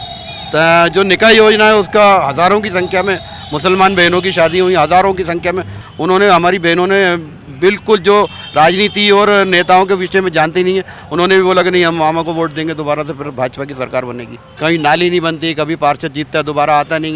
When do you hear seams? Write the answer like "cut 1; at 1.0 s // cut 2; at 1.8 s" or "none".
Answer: cut 1; at 5.7 s // cut 2; at 14.4 s